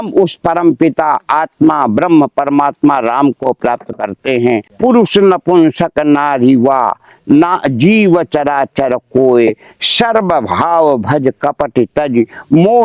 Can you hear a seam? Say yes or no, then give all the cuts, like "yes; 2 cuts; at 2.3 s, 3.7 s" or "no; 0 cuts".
yes; 1 cut; at 4.7 s